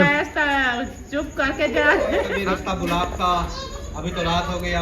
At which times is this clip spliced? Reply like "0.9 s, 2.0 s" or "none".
2.3 s